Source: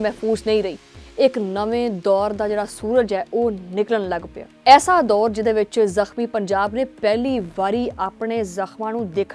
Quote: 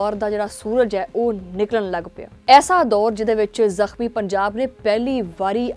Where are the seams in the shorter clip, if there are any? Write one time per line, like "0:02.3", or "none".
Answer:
none